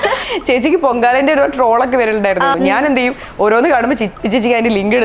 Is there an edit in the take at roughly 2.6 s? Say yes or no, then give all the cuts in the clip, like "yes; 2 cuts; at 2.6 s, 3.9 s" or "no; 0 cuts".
yes; 1 cut; at 2.6 s